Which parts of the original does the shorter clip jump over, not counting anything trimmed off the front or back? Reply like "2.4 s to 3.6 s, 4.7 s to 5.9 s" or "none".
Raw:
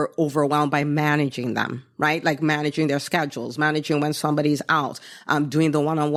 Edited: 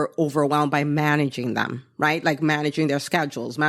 none